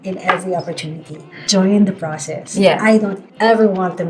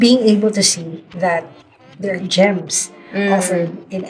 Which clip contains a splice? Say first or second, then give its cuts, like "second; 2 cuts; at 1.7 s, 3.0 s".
first; 1 cut; at 1.3 s